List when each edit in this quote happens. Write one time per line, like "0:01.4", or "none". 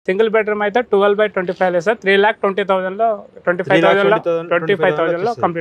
none